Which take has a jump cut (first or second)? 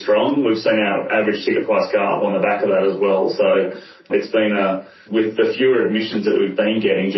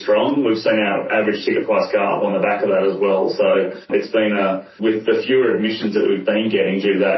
second